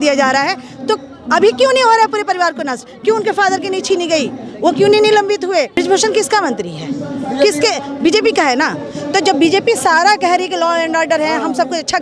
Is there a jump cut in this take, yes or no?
yes